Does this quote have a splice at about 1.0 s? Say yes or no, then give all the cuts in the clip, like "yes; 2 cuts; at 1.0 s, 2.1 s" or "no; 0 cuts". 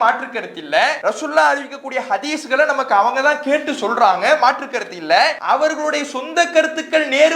yes; 2 cuts; at 1.0 s, 5.4 s